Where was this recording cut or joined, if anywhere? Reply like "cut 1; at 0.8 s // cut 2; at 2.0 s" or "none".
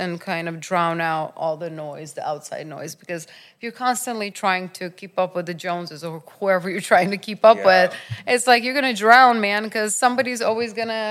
cut 1; at 4.3 s